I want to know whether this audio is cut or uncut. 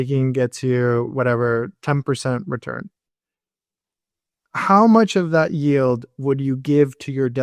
uncut